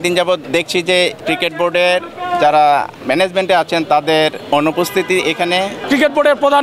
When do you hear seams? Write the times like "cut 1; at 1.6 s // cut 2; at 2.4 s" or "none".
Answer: cut 1; at 0.9 s // cut 2; at 2.9 s // cut 3; at 4.4 s // cut 4; at 5.8 s